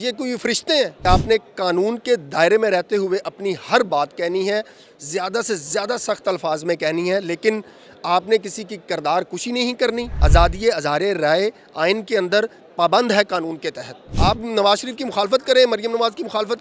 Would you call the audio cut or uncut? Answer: cut